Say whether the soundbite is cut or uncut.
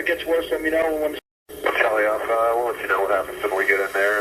cut